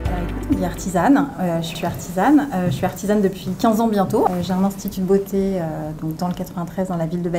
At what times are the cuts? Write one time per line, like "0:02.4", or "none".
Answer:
0:04.3